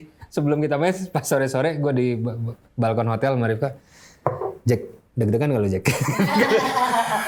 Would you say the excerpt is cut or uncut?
uncut